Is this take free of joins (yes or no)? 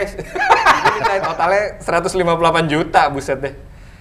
no